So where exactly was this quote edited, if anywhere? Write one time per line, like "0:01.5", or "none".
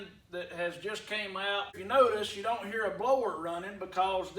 0:01.8